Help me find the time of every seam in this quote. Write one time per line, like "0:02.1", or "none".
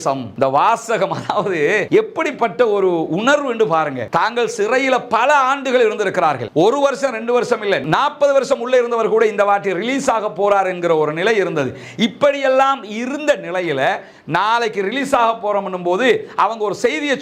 none